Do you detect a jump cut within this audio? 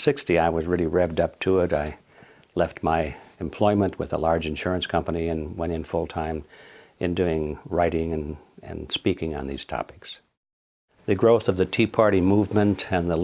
no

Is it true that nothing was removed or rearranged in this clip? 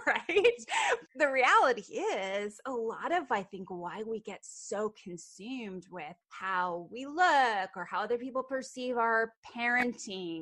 no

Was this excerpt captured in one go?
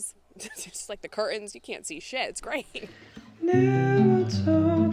no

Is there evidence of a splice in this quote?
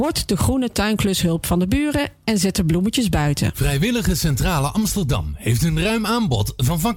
yes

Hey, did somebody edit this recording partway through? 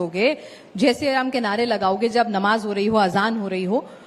no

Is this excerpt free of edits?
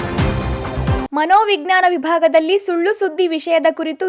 no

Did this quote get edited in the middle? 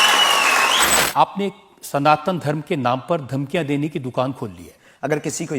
yes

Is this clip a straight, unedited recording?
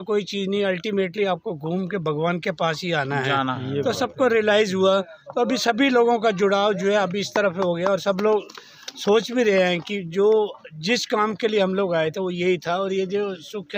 yes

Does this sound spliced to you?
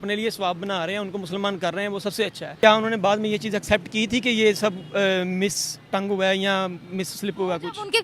yes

